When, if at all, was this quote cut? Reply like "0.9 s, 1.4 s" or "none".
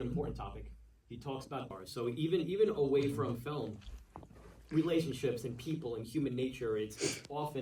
1.6 s